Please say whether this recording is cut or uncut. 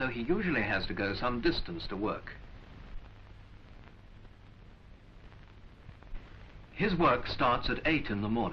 cut